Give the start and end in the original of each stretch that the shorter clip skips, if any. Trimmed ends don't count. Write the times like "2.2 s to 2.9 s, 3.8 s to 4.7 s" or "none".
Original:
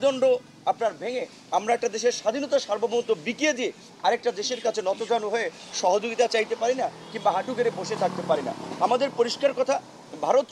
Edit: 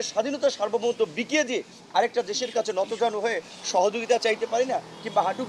none